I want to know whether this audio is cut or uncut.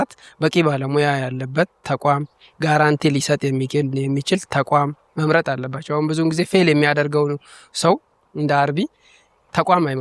uncut